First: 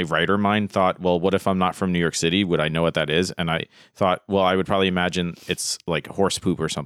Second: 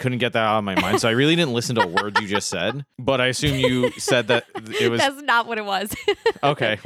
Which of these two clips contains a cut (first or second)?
second